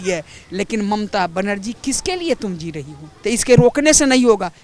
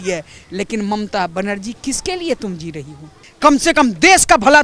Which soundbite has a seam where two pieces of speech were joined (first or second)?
first